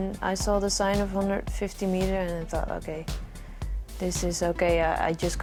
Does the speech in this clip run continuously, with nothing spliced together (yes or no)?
yes